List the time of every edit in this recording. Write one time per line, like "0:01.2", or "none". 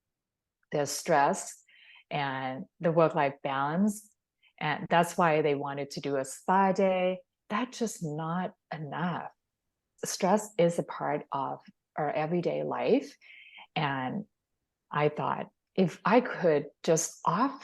0:07.3